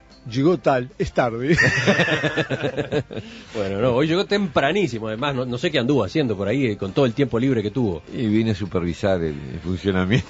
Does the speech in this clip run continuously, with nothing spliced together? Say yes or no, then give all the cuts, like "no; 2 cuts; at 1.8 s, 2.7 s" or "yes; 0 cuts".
no; 1 cut; at 8.7 s